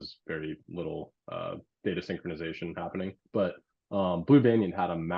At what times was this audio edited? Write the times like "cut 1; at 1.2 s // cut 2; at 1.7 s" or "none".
cut 1; at 3.2 s